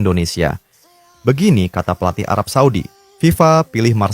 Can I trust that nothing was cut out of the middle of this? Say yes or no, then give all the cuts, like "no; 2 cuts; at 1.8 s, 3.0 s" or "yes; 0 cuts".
no; 1 cut; at 3.0 s